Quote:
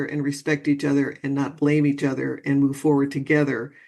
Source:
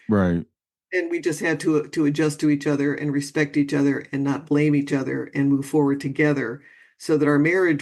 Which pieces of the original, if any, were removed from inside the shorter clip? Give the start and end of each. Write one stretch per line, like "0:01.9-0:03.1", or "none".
none